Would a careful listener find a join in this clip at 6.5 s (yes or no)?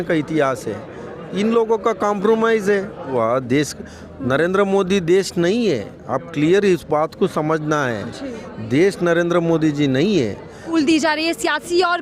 no